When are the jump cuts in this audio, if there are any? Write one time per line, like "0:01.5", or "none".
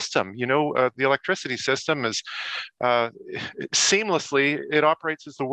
none